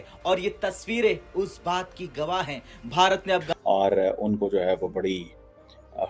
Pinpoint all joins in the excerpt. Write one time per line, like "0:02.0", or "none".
0:03.5